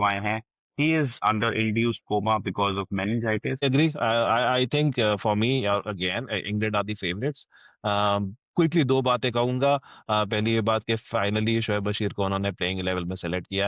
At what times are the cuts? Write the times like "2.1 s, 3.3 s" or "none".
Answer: 1.1 s, 3.6 s